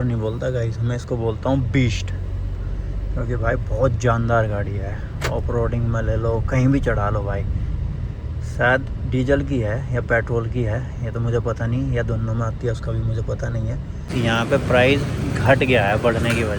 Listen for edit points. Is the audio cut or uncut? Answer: cut